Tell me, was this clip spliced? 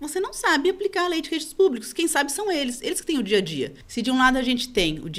yes; 1 cut; at 3.8 s

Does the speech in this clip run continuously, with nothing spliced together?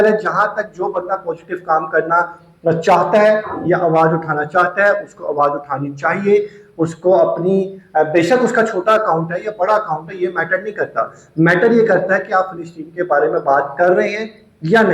yes; 0 cuts

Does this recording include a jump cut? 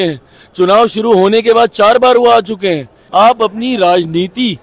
yes; 1 cut; at 2.9 s

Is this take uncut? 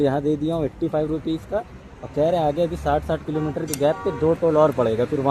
yes; 0 cuts

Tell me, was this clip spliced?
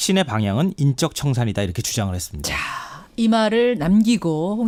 no; 0 cuts

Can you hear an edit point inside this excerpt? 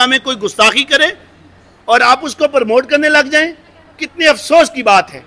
no; 0 cuts

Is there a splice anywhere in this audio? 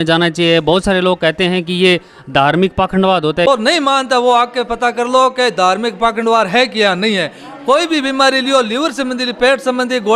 yes; 1 cut; at 3.5 s

